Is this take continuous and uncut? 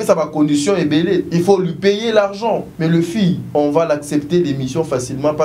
no; 3 cuts; at 1.3 s, 2.7 s, 3.4 s

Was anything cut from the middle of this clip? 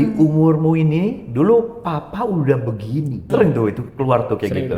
yes; 1 cut; at 3.2 s

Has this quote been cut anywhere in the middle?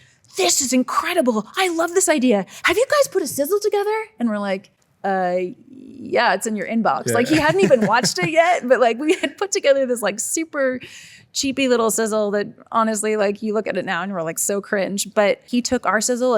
yes; 1 cut; at 15.4 s

